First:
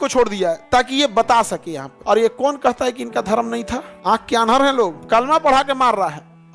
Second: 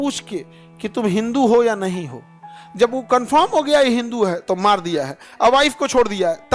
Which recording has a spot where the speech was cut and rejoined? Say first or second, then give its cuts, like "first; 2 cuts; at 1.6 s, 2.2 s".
first; 3 cuts; at 1.9 s, 3.9 s, 5.0 s